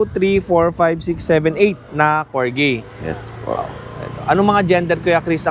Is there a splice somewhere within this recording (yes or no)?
no